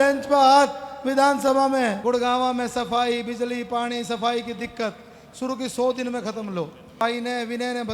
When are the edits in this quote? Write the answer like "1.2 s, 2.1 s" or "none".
2.0 s, 7.0 s